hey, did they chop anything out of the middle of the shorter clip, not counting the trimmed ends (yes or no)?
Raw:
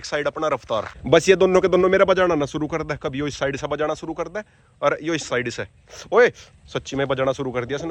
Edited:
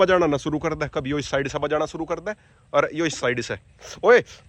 no